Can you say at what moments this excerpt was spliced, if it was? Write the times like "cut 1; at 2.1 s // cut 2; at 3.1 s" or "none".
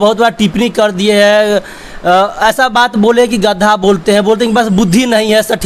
none